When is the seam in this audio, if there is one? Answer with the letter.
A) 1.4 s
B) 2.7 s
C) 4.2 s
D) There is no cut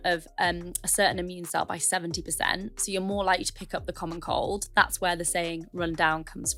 D